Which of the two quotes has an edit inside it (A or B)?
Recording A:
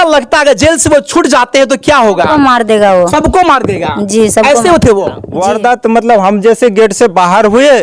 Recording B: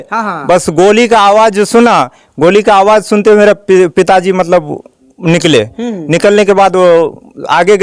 A